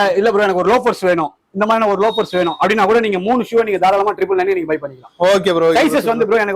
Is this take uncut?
yes; 0 cuts

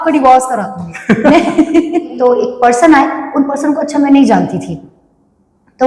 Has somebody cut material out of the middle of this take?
yes; 1 cut; at 2.1 s

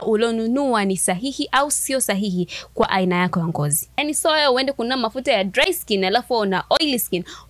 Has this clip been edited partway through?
yes; 1 cut; at 4.0 s

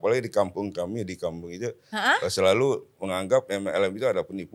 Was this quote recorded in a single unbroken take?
yes; 0 cuts

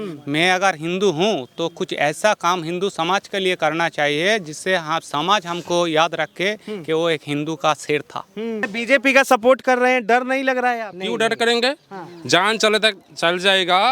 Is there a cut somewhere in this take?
yes; 1 cut; at 8.7 s

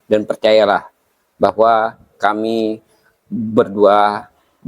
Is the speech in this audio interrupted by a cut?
no; 0 cuts

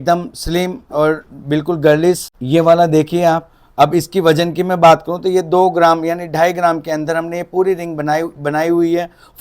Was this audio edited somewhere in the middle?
yes; 1 cut; at 2.3 s

